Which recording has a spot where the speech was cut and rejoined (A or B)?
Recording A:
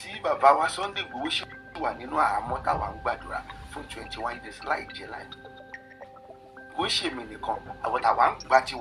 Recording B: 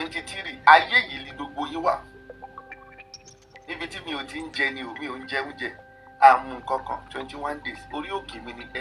B